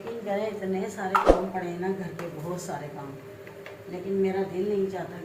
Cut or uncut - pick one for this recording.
uncut